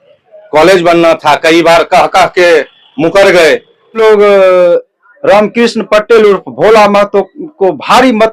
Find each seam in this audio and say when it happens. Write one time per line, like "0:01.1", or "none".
0:04.0